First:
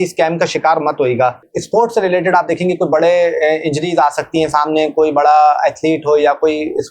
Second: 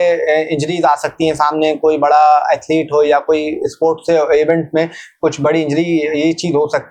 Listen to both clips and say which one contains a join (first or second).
first